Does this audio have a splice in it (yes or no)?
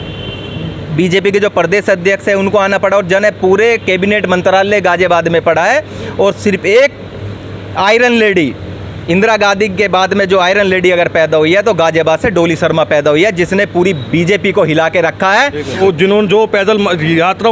yes